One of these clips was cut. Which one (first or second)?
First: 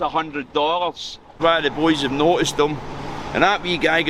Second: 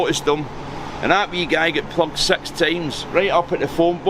first